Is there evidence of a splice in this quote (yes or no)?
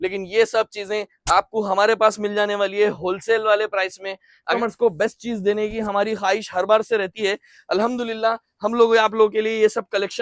yes